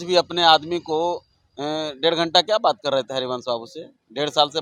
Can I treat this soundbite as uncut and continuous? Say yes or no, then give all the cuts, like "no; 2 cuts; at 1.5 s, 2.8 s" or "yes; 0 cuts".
yes; 0 cuts